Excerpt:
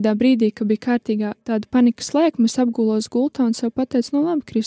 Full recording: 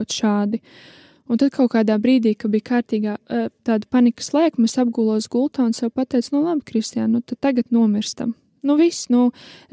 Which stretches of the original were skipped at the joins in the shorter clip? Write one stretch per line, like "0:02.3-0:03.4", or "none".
0:03.2-0:03.6